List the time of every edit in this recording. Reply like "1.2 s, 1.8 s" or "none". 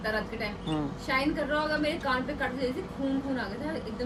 none